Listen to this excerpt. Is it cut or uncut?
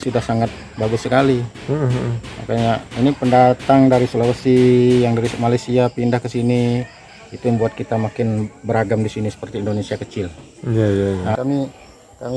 cut